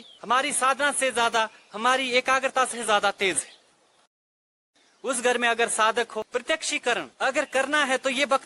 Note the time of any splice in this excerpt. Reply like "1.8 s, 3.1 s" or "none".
4.3 s, 6.3 s